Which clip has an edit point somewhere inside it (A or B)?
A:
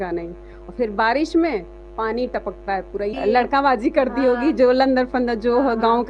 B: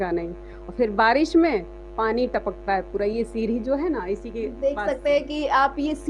A